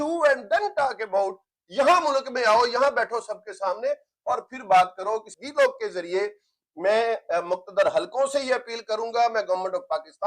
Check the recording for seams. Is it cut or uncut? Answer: cut